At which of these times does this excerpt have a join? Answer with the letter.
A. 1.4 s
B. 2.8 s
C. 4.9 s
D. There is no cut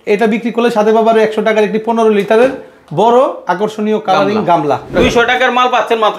C